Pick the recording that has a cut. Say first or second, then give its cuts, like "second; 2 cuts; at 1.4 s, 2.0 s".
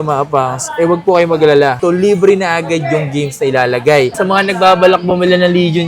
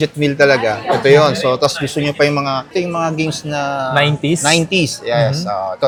first; 1 cut; at 4.1 s